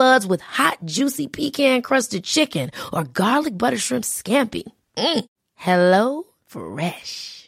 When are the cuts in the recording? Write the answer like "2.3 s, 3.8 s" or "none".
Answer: none